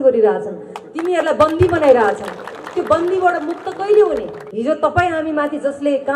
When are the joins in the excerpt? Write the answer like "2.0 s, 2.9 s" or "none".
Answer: 4.4 s